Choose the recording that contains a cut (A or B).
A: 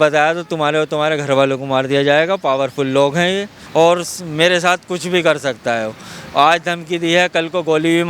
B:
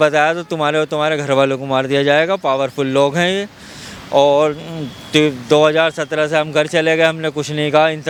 A